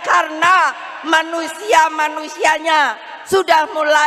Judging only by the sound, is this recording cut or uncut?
uncut